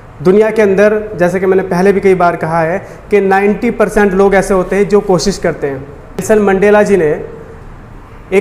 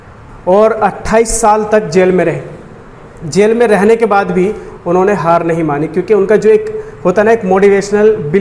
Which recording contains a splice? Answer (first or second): first